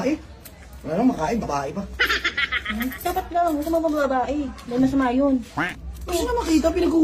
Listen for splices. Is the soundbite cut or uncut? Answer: cut